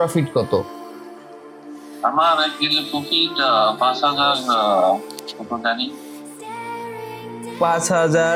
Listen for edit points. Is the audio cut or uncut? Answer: uncut